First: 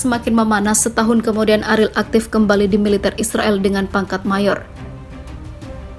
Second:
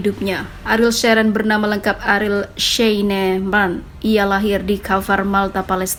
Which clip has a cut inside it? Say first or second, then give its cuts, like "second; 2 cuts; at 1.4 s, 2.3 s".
first; 1 cut; at 4.7 s